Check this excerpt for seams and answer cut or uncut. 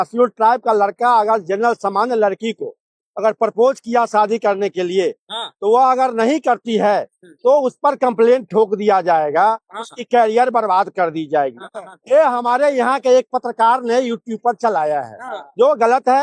uncut